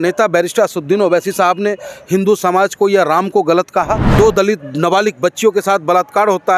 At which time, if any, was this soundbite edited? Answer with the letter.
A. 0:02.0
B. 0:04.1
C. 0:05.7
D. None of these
B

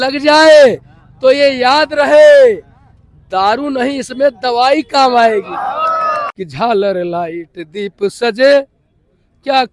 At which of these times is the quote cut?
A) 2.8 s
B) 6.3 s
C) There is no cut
B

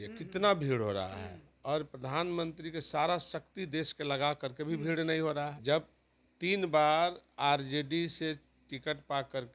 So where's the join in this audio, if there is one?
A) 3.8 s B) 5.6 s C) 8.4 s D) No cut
B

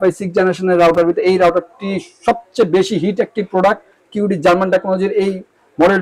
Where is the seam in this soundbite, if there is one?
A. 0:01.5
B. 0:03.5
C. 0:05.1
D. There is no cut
D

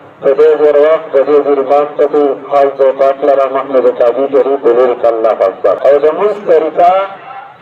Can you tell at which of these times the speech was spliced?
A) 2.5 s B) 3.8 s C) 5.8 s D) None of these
C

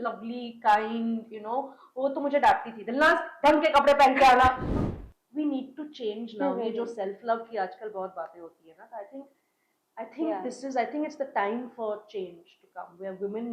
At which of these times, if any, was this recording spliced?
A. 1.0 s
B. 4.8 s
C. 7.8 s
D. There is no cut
B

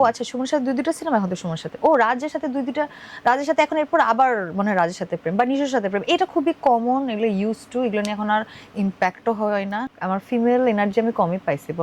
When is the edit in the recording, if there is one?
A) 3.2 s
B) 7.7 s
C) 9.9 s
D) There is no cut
C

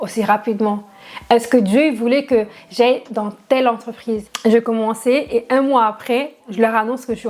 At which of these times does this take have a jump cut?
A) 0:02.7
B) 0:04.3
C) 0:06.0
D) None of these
B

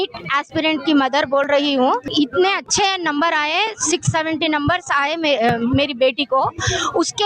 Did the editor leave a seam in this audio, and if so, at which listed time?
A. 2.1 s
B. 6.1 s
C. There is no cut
A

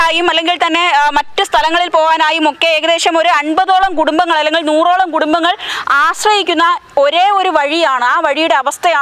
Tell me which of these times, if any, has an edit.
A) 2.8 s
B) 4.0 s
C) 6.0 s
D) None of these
D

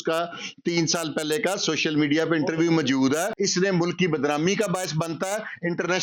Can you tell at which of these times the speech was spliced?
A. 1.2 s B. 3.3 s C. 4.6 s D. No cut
B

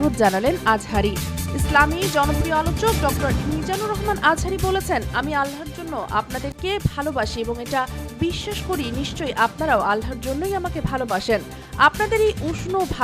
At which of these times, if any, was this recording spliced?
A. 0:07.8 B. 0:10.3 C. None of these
C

